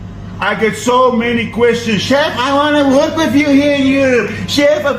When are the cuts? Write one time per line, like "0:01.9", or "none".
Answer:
none